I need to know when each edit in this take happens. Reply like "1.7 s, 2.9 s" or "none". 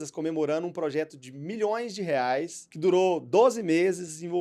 2.6 s